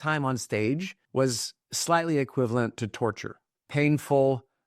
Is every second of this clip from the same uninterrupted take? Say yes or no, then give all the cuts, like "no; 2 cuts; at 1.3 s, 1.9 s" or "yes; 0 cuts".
no; 1 cut; at 1.0 s